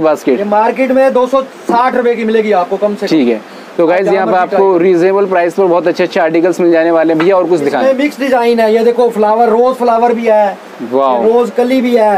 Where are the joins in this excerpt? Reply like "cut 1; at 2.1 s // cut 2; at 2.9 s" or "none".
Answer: none